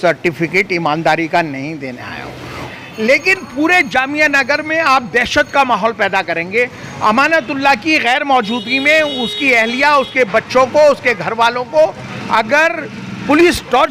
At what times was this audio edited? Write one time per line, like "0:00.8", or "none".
0:02.6